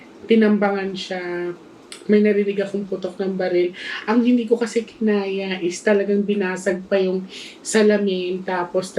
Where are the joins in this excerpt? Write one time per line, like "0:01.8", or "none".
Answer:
none

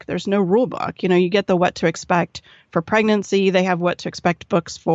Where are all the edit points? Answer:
none

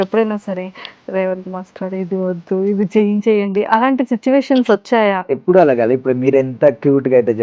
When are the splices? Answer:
0:05.3

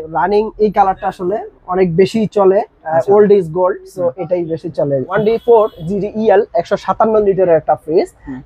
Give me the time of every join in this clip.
0:05.1

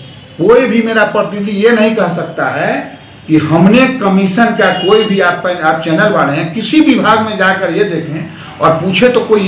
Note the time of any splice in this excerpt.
none

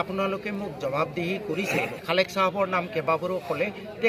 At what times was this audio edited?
0:02.0

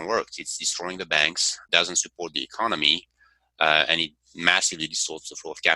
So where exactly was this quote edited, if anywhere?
0:01.6

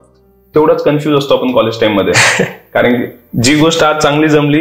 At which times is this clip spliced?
none

